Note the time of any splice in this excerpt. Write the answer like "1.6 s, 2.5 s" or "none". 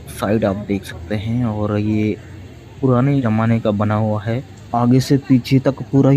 3.2 s, 4.5 s